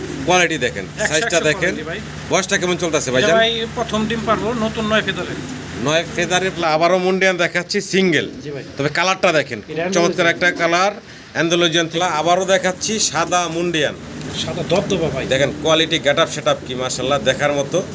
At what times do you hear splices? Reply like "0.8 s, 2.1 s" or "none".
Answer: 6.5 s, 11.9 s